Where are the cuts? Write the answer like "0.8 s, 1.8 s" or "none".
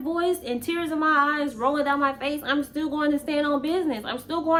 none